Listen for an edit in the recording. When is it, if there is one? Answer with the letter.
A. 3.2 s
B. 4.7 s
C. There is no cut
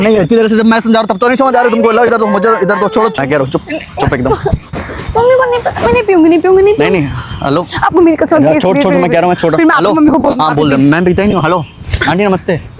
A